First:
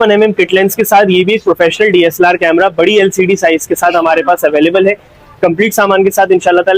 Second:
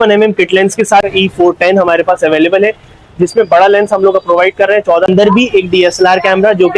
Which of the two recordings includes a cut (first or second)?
second